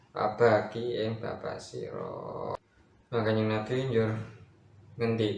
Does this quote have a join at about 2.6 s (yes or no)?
yes